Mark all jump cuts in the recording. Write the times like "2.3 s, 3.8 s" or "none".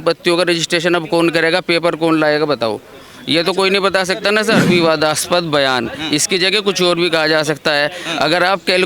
4.6 s